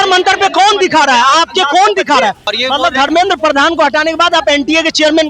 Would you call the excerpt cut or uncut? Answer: cut